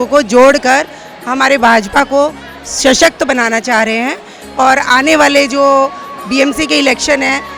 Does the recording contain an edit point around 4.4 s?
no; 0 cuts

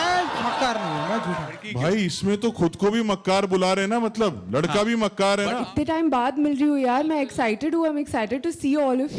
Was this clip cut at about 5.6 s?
yes; 2 cuts; at 1.6 s, 5.6 s

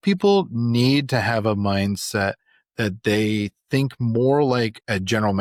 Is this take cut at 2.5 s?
no; 0 cuts

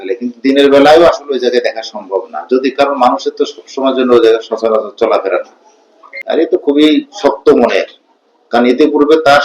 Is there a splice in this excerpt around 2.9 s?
no; 1 cut; at 6.1 s

